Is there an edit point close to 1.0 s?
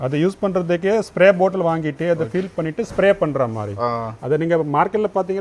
no; 0 cuts

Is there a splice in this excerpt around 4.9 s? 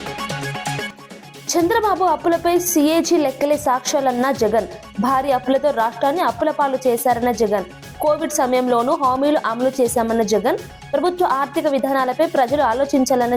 no; 1 cut; at 0.9 s

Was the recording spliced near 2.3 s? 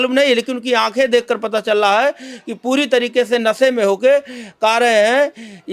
no; 0 cuts

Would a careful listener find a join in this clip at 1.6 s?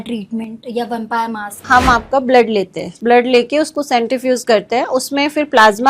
yes; 2 cuts; at 1.6 s, 2.8 s

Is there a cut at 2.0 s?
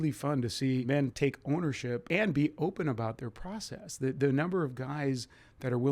yes; 2 cuts; at 0.9 s, 2.0 s

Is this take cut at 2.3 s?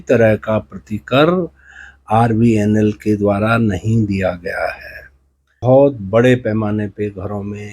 no; 1 cut; at 5.6 s

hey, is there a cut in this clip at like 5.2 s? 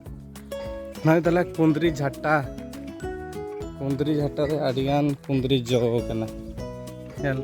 no; 3 cuts; at 1.0 s, 2.4 s, 3.6 s

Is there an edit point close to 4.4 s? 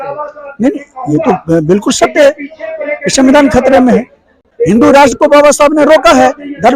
yes; 1 cut; at 4.4 s

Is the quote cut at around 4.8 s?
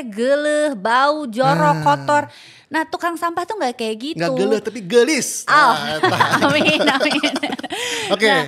no; 0 cuts

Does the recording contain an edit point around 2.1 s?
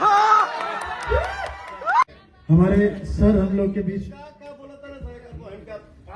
yes; 1 cut; at 2.1 s

